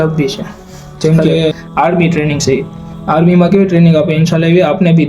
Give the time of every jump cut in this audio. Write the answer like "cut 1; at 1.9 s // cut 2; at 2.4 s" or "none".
cut 1; at 1.6 s